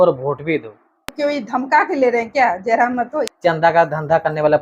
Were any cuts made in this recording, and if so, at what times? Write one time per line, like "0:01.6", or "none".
0:01.1
0:03.3